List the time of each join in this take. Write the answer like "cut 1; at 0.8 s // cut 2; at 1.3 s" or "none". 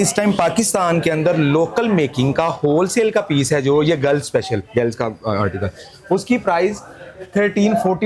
none